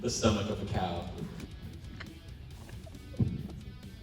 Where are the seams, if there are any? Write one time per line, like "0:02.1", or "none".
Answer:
0:01.4